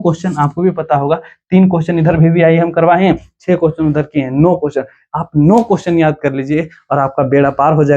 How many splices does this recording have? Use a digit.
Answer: 0